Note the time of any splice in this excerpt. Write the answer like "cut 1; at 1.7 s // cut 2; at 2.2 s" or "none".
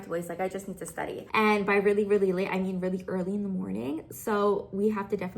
cut 1; at 1.2 s